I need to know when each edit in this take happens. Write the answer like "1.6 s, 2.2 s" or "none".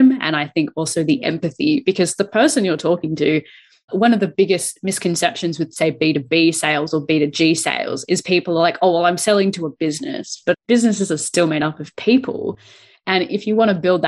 10.6 s